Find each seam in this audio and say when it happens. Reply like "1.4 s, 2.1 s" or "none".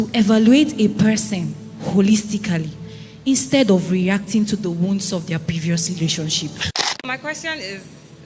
7.0 s